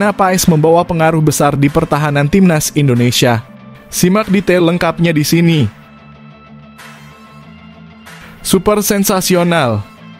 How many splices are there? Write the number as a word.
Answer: two